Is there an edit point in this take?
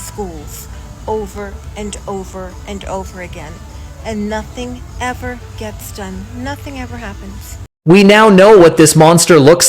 yes; 1 cut; at 7.6 s

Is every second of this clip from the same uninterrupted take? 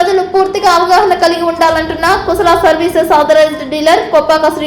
yes; 0 cuts

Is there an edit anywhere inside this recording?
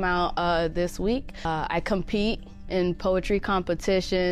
yes; 1 cut; at 1.4 s

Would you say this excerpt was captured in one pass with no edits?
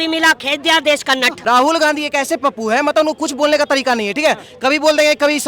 no; 1 cut; at 1.4 s

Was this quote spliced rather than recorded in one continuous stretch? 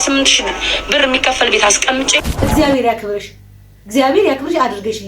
yes; 1 cut; at 2.3 s

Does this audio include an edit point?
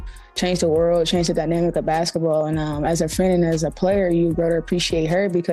no; 0 cuts

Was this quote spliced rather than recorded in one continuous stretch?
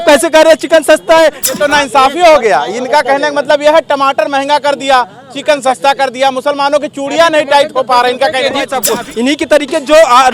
yes; 2 cuts; at 1.5 s, 8.8 s

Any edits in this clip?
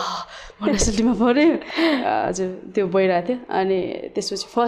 no; 0 cuts

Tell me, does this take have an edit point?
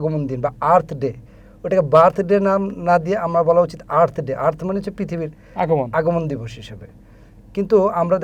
no; 0 cuts

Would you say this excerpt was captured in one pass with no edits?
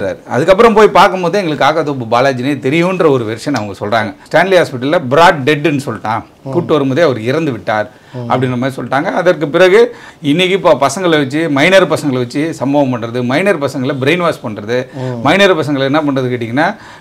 no; 2 cuts; at 4.2 s, 10.0 s

